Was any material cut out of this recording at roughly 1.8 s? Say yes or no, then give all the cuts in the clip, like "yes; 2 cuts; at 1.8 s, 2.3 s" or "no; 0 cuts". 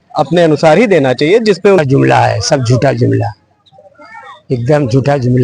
yes; 1 cut; at 1.8 s